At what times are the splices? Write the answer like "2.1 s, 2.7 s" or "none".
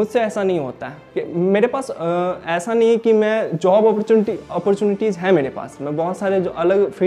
1.1 s

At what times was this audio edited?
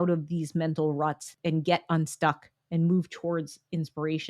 1.3 s

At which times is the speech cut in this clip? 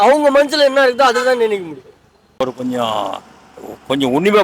2.4 s

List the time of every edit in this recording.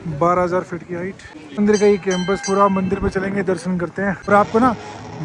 none

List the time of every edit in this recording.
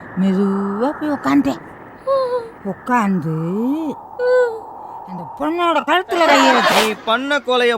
6.7 s

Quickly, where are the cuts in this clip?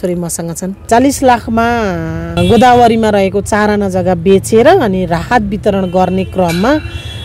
0.9 s, 2.3 s

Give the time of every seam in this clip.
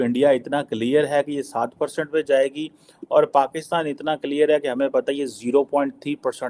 none

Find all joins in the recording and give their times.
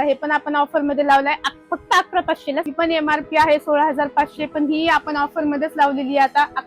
2.7 s

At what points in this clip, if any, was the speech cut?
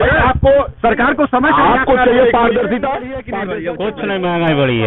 3.3 s

